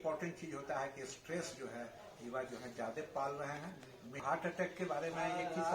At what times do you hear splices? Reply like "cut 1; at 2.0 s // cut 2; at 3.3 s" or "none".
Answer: cut 1; at 4.2 s